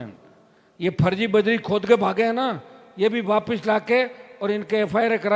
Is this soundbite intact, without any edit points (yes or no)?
yes